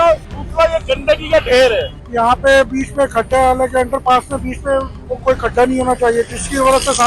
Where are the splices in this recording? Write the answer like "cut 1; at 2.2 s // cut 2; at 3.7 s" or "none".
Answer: cut 1; at 2.0 s